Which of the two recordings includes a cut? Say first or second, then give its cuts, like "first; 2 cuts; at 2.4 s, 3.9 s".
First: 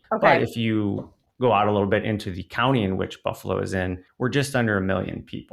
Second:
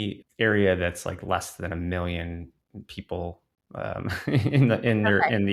first; 1 cut; at 4.0 s